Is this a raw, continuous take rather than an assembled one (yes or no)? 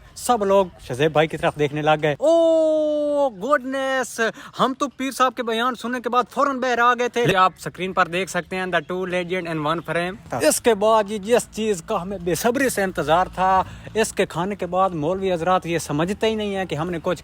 no